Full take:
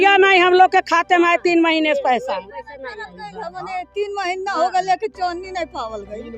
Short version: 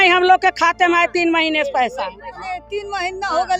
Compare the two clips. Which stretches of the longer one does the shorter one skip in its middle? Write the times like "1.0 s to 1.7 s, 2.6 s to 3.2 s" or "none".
2.7 s to 3.6 s